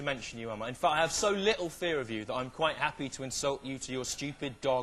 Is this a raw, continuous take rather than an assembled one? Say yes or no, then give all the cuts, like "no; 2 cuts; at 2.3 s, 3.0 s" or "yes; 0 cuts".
yes; 0 cuts